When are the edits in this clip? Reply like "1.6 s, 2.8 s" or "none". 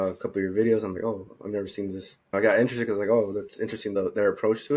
2.3 s, 3.9 s